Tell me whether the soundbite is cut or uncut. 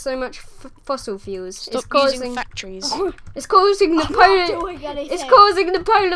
uncut